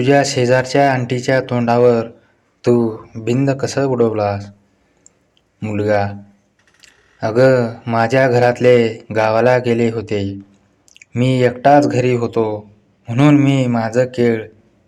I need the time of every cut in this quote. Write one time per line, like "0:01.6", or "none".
none